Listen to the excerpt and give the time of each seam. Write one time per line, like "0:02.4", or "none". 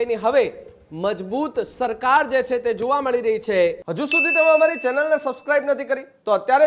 0:03.8